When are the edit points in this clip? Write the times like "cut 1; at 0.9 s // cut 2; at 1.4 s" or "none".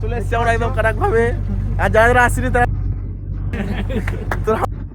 cut 1; at 3.6 s